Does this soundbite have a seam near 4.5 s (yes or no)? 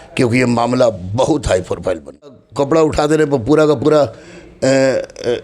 no